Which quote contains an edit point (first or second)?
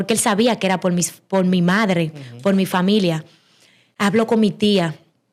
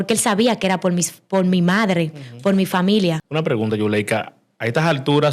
second